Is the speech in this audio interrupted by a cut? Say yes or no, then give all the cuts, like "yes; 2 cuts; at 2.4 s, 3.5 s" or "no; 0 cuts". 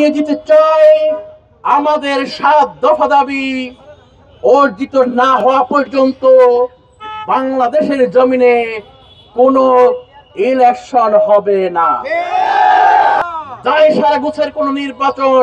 yes; 1 cut; at 13.2 s